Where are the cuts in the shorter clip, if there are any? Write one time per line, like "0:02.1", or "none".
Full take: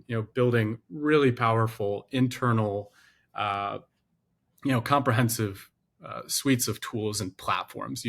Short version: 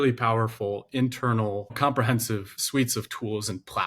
0:01.8
0:02.6